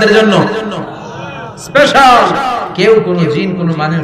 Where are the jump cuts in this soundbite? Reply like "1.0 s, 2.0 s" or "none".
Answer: 2.6 s